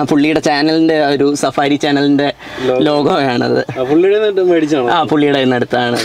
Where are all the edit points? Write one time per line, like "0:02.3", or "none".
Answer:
none